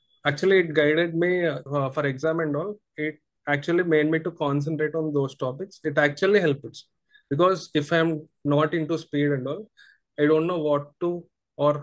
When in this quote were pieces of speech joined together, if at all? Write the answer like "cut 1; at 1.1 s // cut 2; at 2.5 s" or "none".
cut 1; at 1.6 s